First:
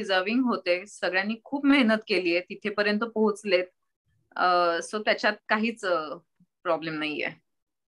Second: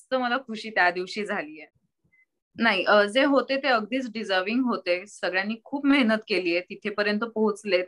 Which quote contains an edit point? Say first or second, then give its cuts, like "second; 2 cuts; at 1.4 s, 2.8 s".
second; 1 cut; at 1.5 s